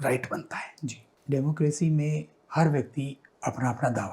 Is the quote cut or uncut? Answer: cut